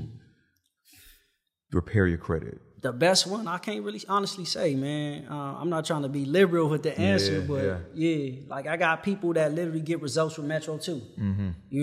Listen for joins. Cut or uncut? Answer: cut